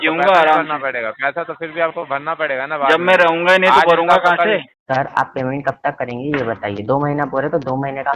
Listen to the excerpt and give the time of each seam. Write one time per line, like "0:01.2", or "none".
0:04.7